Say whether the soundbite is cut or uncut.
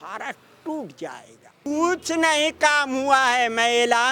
cut